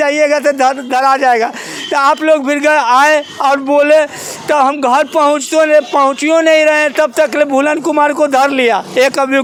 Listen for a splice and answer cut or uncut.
uncut